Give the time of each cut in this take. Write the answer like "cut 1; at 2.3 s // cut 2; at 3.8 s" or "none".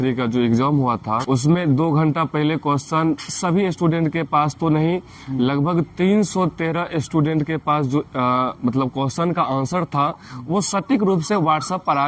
cut 1; at 1.2 s